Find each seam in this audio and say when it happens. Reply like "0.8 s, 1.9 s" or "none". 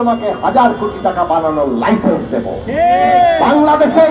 none